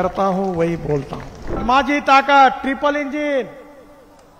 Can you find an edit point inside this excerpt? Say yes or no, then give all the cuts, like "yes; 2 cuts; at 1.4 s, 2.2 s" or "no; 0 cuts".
yes; 1 cut; at 1.6 s